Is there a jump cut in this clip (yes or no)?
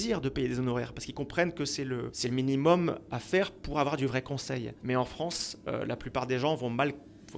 yes